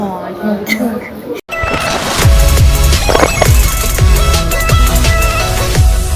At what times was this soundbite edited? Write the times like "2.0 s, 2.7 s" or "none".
1.5 s